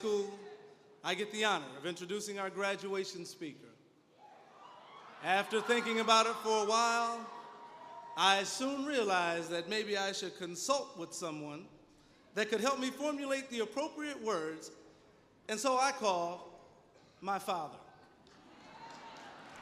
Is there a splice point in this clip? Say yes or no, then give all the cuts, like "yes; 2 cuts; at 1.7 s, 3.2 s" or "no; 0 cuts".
no; 0 cuts